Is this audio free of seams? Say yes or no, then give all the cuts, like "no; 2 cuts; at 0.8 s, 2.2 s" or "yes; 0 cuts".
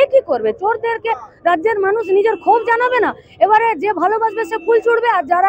yes; 0 cuts